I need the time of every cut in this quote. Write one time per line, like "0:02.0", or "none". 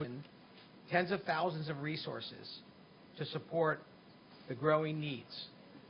none